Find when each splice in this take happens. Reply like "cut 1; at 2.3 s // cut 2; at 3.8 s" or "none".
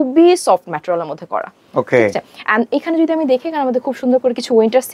none